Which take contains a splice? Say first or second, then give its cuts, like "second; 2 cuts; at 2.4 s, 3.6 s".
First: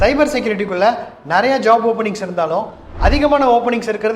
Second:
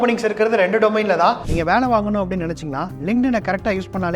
second; 1 cut; at 1.5 s